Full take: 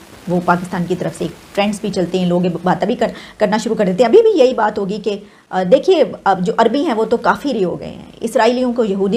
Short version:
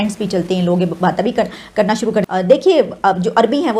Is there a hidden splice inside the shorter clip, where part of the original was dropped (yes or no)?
yes